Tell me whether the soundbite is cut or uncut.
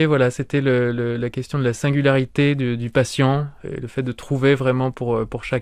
cut